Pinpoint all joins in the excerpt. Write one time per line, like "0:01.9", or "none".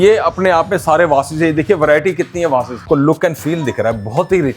0:02.9